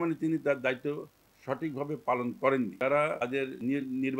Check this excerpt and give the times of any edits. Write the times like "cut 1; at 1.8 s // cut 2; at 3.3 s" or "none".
cut 1; at 3.3 s